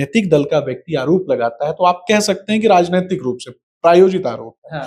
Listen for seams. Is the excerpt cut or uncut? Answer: uncut